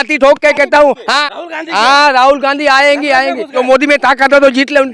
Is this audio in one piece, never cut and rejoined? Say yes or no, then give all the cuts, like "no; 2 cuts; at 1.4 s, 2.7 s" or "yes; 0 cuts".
no; 2 cuts; at 1.4 s, 3.5 s